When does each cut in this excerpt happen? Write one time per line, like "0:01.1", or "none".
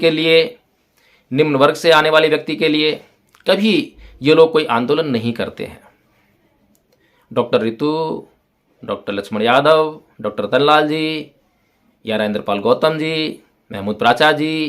none